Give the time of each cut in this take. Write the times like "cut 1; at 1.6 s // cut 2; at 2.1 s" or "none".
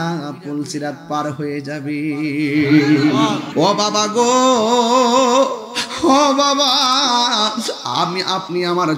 cut 1; at 3.5 s